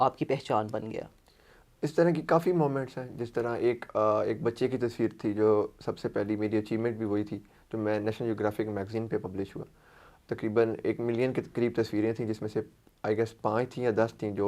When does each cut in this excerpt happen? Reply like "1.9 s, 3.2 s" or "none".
none

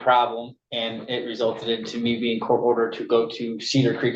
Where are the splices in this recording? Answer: none

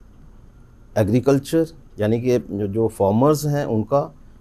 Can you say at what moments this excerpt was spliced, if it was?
none

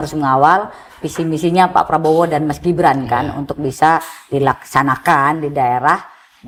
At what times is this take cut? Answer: none

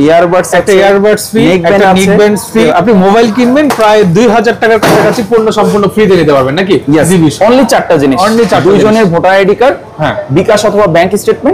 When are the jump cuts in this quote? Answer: 2.6 s, 6.9 s

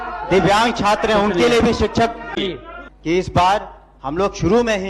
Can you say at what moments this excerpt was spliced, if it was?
2.3 s

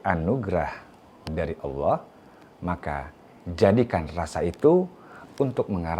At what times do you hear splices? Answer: none

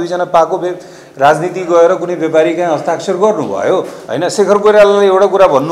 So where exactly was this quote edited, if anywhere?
4.0 s

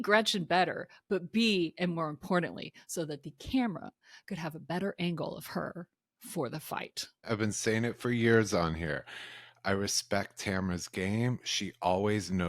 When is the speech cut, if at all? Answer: 7.3 s

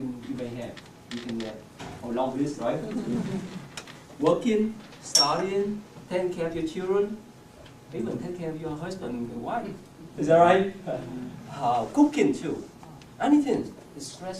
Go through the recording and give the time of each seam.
13.5 s

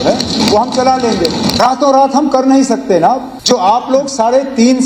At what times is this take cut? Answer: 1.5 s, 3.3 s

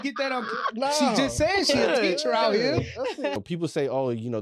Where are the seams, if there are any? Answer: 3.4 s

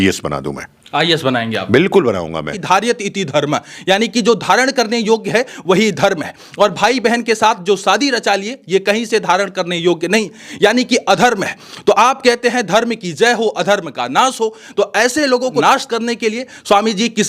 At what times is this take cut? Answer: 2.6 s, 15.6 s

